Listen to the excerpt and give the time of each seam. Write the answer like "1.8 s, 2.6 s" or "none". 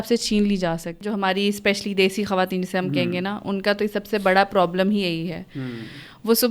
1.0 s